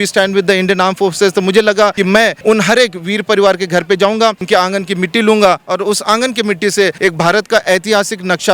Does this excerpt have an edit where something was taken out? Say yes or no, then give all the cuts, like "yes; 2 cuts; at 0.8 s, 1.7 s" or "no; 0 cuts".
yes; 3 cuts; at 2.1 s, 4.4 s, 7.0 s